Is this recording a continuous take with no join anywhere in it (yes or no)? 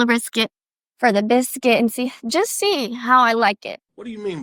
yes